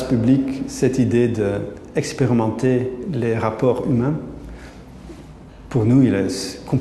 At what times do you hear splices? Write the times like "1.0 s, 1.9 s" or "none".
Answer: none

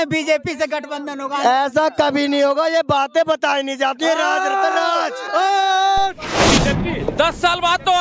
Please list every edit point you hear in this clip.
6.5 s

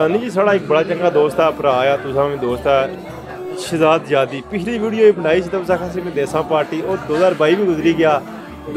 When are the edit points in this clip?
none

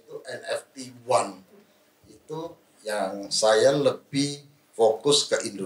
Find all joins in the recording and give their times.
none

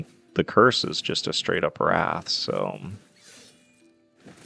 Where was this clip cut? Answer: none

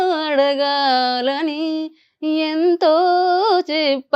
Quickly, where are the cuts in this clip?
none

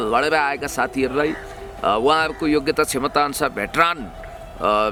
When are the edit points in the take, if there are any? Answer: none

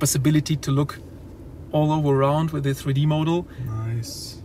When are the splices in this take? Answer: none

